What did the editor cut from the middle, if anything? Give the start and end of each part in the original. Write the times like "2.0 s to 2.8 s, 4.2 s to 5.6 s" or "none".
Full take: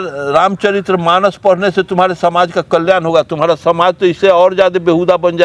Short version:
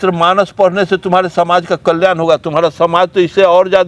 none